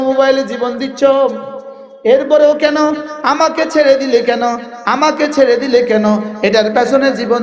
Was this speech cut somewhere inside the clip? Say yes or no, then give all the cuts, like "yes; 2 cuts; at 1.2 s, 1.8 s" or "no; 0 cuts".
no; 0 cuts